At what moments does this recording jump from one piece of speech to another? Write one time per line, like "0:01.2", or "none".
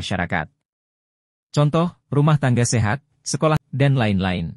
0:03.6